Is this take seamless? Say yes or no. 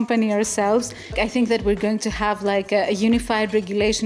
no